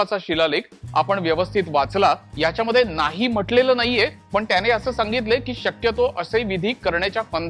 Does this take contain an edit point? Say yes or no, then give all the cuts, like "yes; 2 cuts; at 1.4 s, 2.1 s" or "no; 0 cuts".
yes; 2 cuts; at 2.3 s, 4.2 s